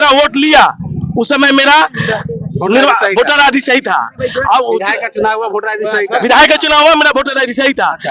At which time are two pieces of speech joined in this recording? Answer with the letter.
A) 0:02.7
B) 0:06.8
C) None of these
C